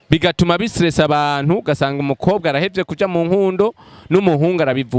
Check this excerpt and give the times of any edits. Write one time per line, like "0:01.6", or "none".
none